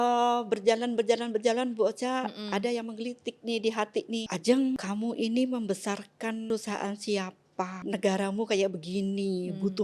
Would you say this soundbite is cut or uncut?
cut